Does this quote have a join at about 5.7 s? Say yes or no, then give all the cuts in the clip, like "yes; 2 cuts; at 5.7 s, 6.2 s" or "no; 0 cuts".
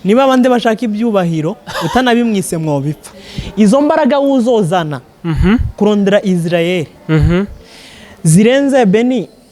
no; 1 cut; at 3.0 s